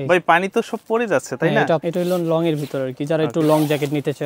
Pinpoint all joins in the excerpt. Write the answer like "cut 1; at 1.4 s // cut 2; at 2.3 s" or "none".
cut 1; at 1.8 s